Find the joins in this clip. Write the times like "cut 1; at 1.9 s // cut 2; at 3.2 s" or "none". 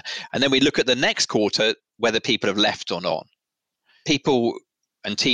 cut 1; at 3.8 s